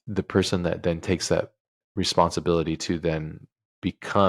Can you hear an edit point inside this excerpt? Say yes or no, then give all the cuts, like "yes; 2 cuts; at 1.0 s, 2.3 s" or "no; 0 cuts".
yes; 1 cut; at 1.8 s